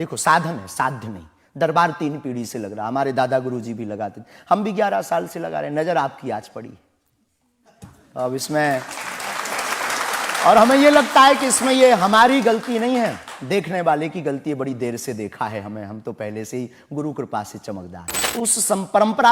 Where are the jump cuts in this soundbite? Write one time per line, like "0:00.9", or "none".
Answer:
0:18.3